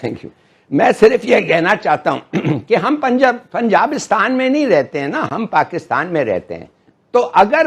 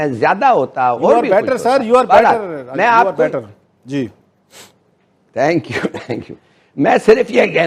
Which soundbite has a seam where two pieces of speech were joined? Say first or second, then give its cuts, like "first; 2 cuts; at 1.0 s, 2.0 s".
first; 1 cut; at 5.2 s